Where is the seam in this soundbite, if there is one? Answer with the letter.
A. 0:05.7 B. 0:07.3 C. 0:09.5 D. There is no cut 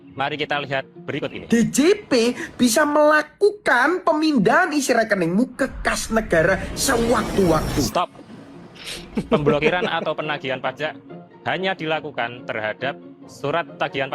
B